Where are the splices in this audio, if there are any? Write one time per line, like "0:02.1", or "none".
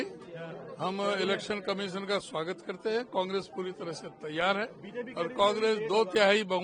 none

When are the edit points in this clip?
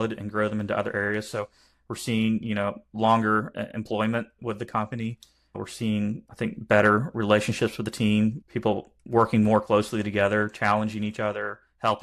0:04.4
0:05.5
0:06.3
0:08.4

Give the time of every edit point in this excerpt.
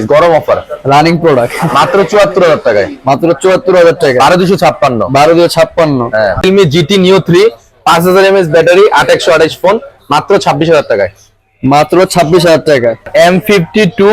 0:06.4
0:13.1

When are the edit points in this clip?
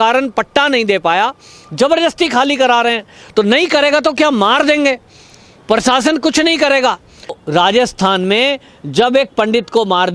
0:07.4

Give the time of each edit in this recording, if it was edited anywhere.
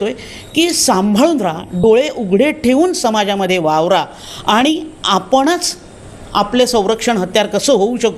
none

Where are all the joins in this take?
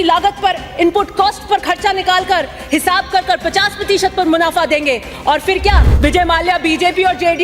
0:05.9

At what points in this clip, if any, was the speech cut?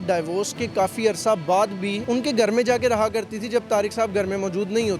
0:02.0

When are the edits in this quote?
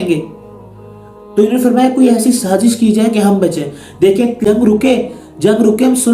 0:04.4

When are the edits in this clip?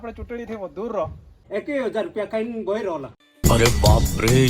0:01.4

